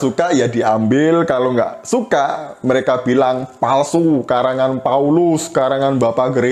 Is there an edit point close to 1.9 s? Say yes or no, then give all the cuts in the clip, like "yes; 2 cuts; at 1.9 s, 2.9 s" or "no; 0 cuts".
no; 1 cut; at 4.2 s